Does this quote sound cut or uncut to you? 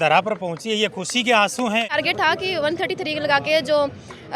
cut